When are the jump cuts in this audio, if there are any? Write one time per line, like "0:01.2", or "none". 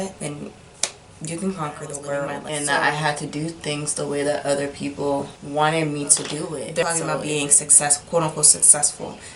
0:02.4
0:06.8